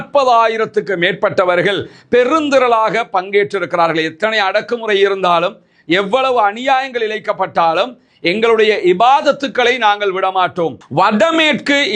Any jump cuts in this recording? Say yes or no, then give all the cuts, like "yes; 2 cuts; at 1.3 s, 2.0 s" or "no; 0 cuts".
yes; 1 cut; at 10.8 s